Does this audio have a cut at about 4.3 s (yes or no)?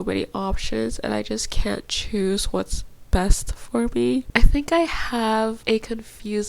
yes